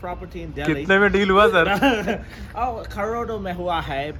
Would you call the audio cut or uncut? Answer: uncut